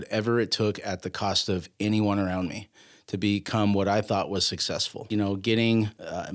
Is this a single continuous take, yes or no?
no